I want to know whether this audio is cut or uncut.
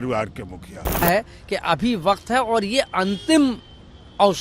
cut